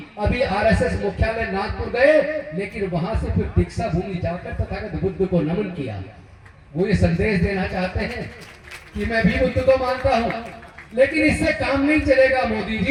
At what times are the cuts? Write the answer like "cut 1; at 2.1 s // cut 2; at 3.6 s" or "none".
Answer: none